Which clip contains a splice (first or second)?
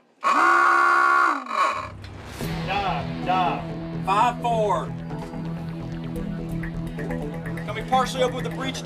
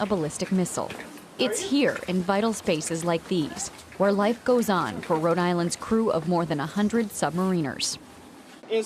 second